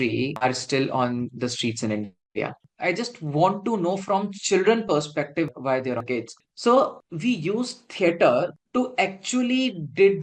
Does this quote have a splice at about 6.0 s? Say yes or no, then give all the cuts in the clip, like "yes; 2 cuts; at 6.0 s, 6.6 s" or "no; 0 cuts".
yes; 2 cuts; at 2.6 s, 6.0 s